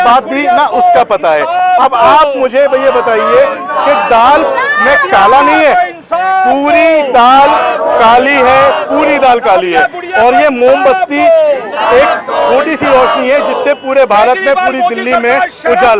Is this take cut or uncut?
uncut